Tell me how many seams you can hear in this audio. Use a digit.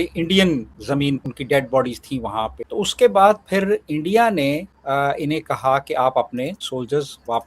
2